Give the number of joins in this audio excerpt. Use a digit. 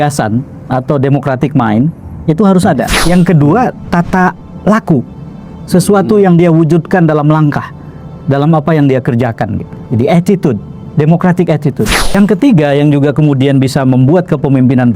2